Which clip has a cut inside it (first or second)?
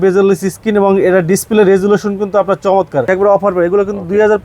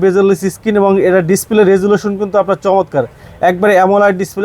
first